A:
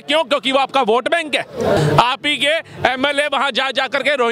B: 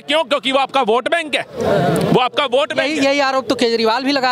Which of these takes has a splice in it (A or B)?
A